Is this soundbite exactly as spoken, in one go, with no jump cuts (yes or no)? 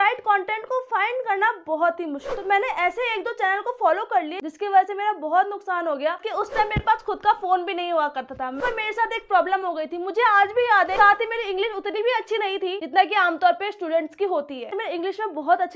no